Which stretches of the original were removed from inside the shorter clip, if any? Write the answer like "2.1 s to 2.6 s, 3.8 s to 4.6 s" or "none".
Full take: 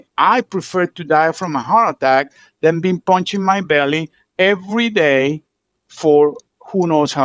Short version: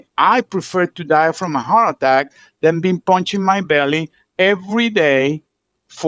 none